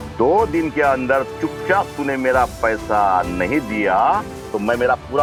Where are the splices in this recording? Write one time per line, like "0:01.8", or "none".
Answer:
none